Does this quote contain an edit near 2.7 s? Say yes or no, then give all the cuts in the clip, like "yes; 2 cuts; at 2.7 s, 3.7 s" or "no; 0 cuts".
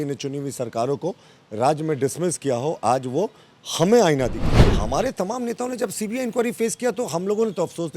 no; 1 cut; at 4.6 s